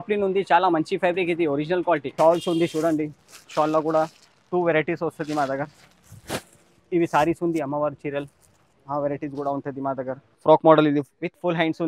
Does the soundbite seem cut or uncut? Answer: cut